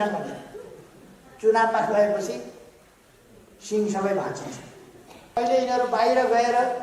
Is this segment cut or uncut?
cut